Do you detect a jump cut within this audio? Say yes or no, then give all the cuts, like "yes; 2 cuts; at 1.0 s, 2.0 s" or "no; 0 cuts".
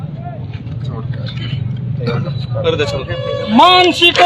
no; 0 cuts